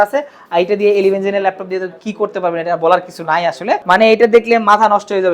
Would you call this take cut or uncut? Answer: cut